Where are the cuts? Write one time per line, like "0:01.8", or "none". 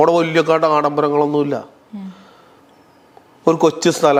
none